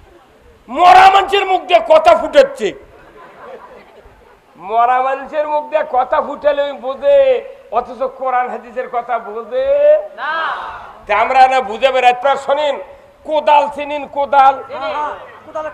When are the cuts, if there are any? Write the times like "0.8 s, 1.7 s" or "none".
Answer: 12.2 s